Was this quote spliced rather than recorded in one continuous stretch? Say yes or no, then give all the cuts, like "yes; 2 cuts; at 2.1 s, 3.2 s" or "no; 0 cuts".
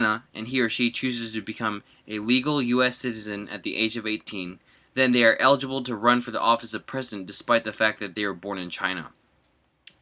yes; 1 cut; at 7.6 s